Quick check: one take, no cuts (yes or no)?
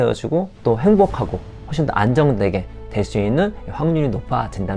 yes